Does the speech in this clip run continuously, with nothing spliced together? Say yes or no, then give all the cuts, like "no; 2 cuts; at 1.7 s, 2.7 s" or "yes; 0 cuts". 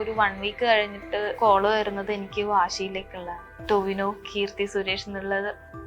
no; 2 cuts; at 1.4 s, 3.5 s